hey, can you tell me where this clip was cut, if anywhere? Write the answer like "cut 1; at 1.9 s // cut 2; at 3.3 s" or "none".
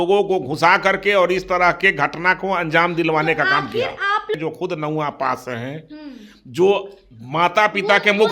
cut 1; at 4.3 s